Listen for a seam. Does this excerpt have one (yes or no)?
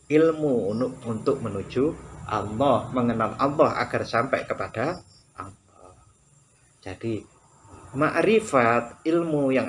no